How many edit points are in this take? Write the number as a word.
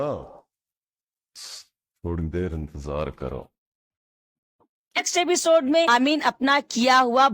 two